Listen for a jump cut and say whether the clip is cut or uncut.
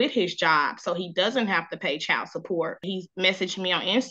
cut